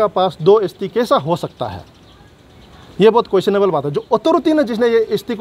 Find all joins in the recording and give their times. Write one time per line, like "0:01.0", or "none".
none